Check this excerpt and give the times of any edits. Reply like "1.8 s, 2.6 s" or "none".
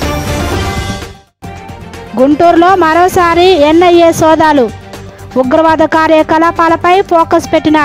0.9 s